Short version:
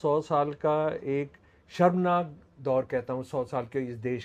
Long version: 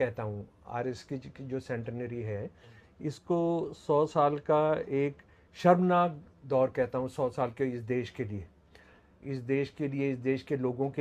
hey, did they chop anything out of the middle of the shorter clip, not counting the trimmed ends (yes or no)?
no